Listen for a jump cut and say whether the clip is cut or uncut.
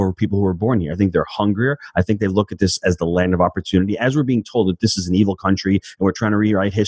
uncut